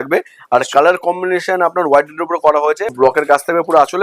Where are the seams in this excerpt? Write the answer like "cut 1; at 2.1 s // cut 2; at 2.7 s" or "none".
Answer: cut 1; at 2.9 s